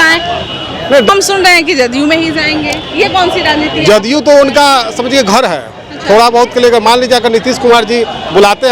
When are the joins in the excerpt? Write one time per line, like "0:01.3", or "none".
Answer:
0:01.1